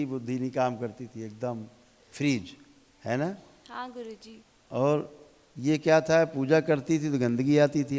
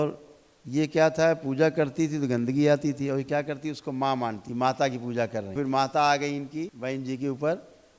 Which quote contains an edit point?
second; 3 cuts; at 4.4 s, 5.5 s, 6.7 s

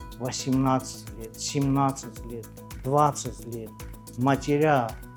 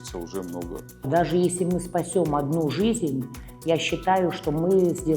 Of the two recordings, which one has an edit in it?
second; 1 cut; at 1.0 s

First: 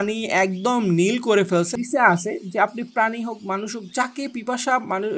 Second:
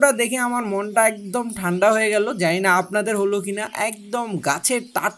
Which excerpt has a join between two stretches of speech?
first; 1 cut; at 1.8 s

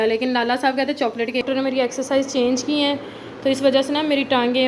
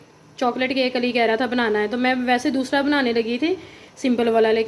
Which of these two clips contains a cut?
first; 1 cut; at 1.4 s

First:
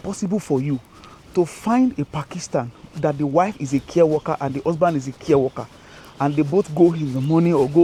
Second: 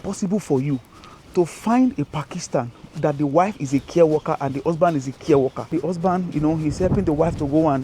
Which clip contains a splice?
second; 1 cut; at 5.7 s

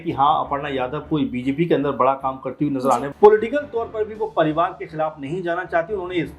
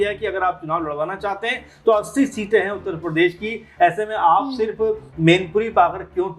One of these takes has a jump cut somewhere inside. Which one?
first; 1 cut; at 3.1 s

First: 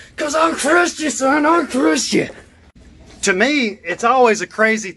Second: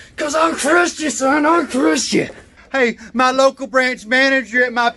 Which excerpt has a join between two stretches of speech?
second; 1 cut; at 2.6 s

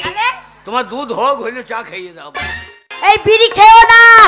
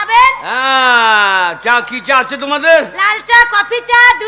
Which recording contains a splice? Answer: first; 1 cut; at 2.8 s

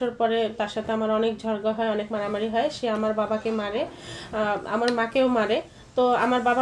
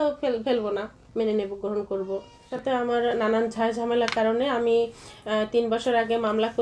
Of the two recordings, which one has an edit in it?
second; 1 cut; at 2.5 s

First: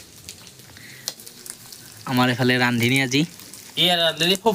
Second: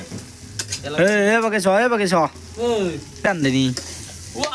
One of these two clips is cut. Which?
second; 1 cut; at 3.3 s

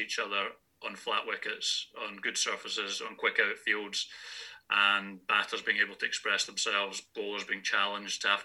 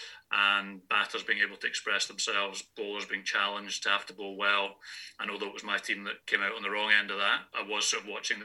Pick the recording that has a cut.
second; 2 cuts; at 6.2 s, 7.5 s

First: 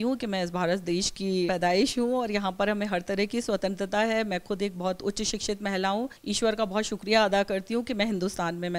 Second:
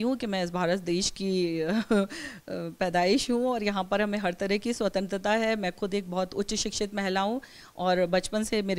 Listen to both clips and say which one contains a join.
first; 2 cuts; at 1.5 s, 6.2 s

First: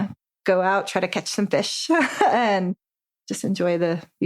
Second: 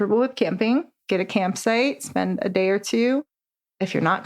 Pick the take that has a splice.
second; 1 cut; at 0.9 s

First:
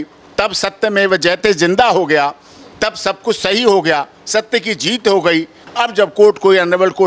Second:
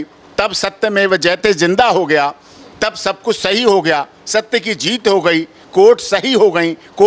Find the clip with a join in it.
first; 1 cut; at 5.6 s

